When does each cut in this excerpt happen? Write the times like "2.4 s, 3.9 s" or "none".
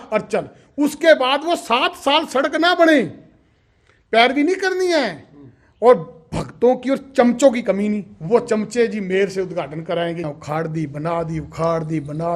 10.3 s